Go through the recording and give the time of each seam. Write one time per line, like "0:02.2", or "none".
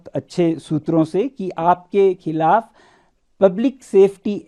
none